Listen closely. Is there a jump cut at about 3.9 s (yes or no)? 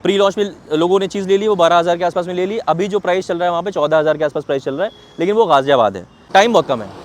no